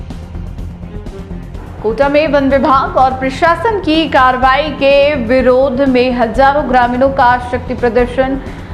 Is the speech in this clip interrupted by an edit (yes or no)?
yes